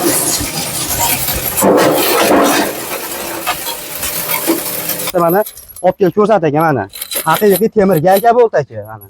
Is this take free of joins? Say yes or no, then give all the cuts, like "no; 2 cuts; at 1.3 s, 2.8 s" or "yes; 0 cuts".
no; 1 cut; at 5.1 s